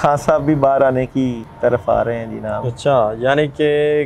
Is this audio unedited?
no; 1 cut; at 1.5 s

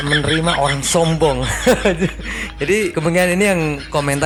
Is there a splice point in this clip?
no; 0 cuts

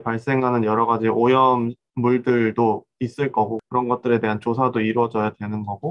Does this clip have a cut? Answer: yes; 1 cut; at 3.6 s

